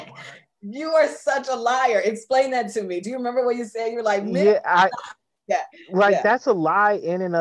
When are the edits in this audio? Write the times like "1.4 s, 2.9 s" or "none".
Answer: none